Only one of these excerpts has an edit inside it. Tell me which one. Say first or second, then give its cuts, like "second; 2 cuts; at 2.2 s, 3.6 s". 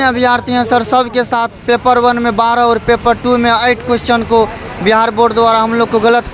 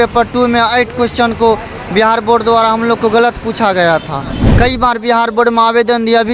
second; 1 cut; at 4.4 s